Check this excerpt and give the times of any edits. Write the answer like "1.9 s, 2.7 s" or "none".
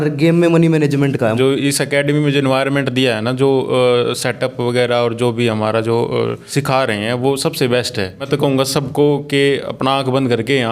1.3 s, 6.4 s, 8.3 s